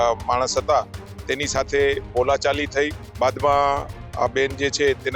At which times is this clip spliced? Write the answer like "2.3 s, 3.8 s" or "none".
3.0 s